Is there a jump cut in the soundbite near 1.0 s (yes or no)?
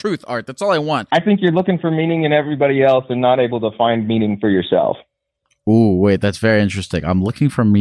yes